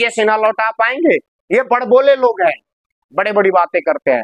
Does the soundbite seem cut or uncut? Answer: uncut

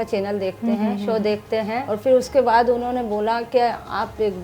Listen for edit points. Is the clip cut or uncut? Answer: cut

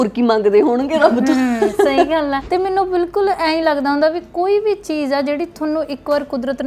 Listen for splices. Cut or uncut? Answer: cut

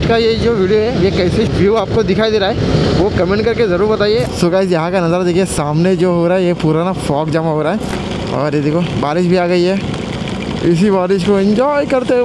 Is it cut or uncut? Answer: cut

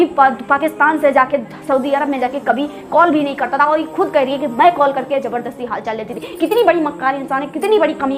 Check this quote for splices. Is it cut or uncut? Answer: uncut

